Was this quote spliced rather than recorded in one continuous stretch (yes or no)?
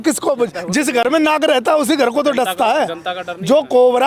no